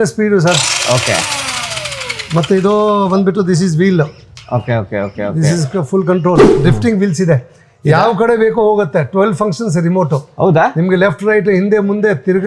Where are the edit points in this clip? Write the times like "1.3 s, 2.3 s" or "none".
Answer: 6.5 s